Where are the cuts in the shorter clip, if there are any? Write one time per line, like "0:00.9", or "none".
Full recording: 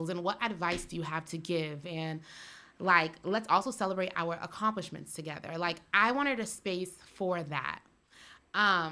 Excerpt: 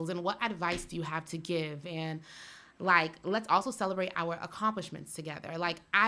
none